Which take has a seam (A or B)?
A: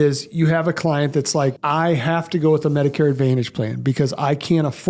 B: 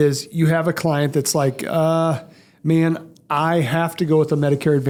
A